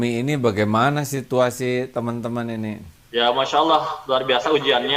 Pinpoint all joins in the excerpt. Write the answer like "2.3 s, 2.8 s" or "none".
2.9 s